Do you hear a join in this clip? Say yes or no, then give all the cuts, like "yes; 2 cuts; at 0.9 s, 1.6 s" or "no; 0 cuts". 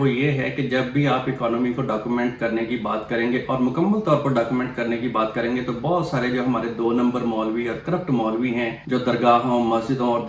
yes; 1 cut; at 8.8 s